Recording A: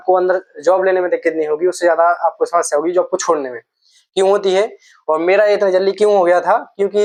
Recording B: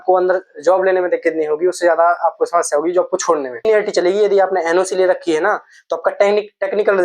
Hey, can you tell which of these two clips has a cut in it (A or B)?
B